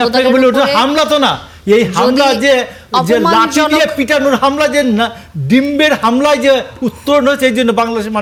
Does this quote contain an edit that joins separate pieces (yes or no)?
no